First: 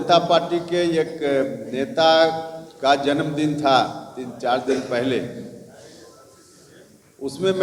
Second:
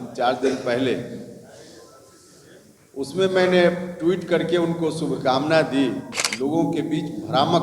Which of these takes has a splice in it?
second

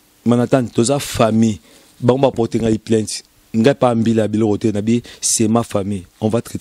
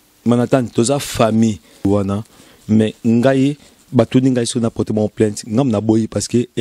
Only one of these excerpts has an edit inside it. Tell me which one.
second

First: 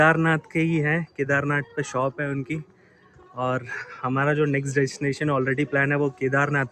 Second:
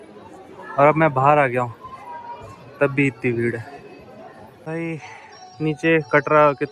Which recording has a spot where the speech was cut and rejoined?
second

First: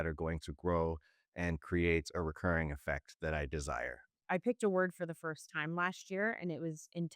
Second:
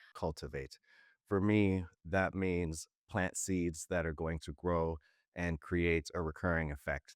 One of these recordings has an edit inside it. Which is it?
first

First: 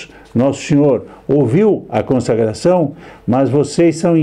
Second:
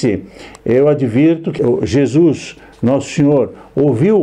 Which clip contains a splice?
second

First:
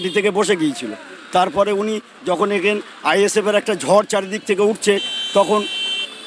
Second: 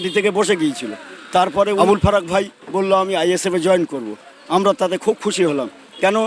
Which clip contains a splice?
second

